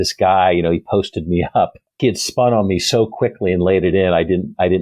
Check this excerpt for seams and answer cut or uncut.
cut